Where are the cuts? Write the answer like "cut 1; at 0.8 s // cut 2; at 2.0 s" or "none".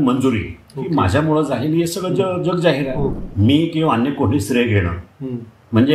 cut 1; at 3.2 s